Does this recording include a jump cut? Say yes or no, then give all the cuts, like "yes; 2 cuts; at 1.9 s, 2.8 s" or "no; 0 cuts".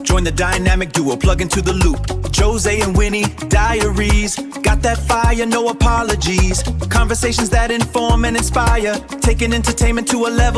no; 0 cuts